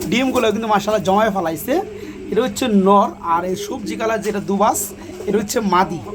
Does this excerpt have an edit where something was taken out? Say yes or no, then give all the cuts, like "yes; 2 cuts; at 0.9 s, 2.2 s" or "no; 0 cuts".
no; 0 cuts